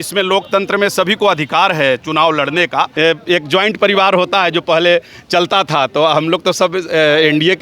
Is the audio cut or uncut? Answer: cut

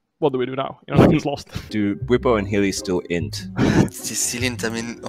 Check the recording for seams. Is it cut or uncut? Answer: cut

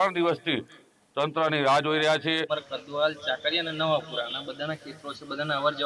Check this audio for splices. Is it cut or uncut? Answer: cut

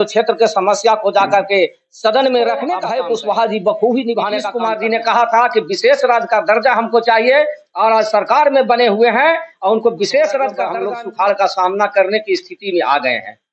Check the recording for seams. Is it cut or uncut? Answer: cut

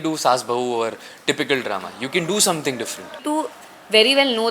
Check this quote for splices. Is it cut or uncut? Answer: cut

